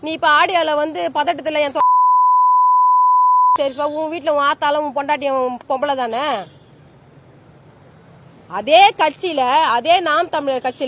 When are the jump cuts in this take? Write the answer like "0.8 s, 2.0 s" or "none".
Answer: none